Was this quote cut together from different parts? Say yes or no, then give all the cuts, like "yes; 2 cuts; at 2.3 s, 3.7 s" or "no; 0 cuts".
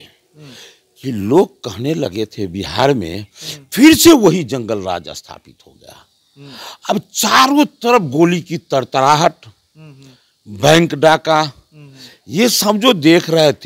no; 0 cuts